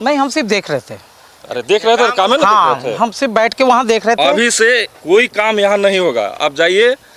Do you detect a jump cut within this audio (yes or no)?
no